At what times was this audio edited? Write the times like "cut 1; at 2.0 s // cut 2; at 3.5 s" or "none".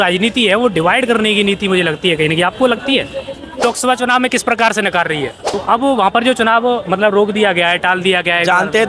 cut 1; at 3.6 s // cut 2; at 5.4 s